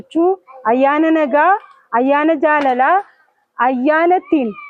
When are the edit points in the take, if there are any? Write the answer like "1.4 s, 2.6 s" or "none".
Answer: none